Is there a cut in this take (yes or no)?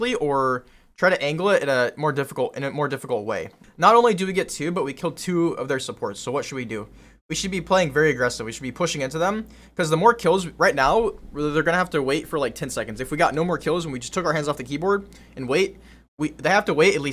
yes